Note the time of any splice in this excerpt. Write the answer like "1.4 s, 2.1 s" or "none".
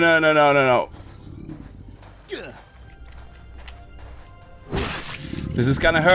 none